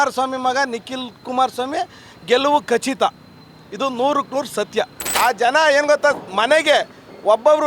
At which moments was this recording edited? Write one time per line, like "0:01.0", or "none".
0:05.2